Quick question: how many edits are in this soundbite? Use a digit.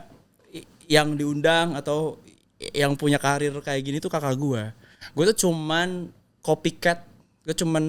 0